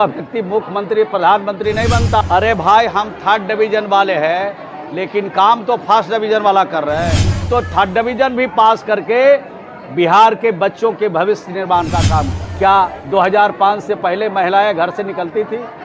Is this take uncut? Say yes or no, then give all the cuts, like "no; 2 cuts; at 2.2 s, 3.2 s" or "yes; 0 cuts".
no; 3 cuts; at 2.2 s, 7.5 s, 12.4 s